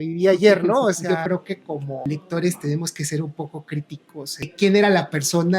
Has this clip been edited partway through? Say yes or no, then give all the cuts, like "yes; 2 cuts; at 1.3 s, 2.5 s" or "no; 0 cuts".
yes; 3 cuts; at 1.1 s, 2.0 s, 4.5 s